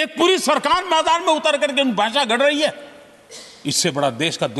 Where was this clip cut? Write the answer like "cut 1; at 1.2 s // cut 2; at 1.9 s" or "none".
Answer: none